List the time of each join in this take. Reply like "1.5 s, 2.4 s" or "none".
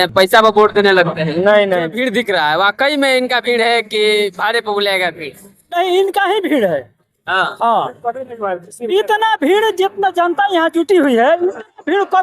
1.9 s